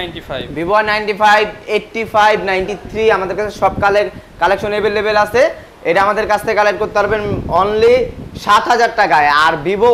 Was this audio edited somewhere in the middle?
no; 0 cuts

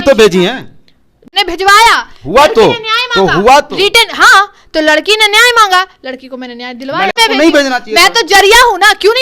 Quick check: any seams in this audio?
yes; 2 cuts; at 1.2 s, 7.2 s

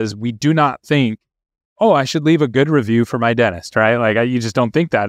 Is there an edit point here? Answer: no; 0 cuts

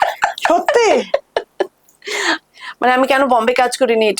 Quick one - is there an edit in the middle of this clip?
yes; 1 cut; at 2.4 s

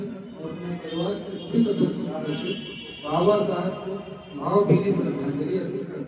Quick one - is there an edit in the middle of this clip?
no; 0 cuts

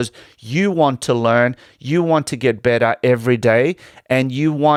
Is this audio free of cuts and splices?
yes; 0 cuts

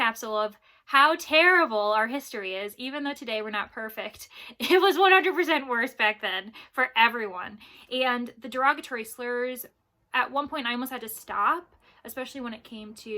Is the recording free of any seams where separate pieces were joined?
yes; 0 cuts

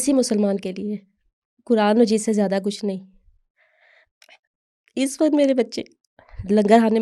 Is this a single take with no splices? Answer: yes; 0 cuts

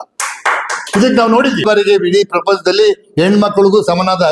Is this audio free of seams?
no; 1 cut; at 1.6 s

